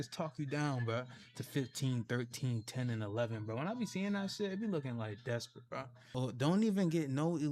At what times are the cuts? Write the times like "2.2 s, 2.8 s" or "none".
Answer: 6.1 s